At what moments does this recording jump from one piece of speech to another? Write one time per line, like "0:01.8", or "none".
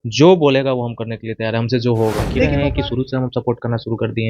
0:02.5